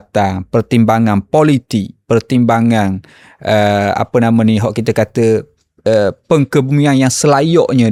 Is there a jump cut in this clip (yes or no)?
no